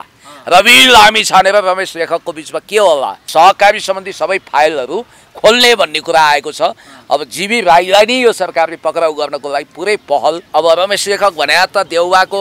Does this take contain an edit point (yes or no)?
yes